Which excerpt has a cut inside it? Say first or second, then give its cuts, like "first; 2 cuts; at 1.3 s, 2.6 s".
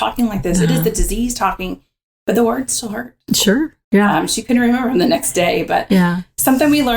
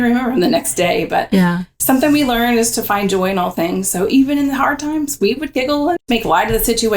second; 1 cut; at 6.0 s